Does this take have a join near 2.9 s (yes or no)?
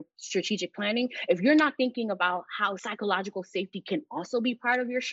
yes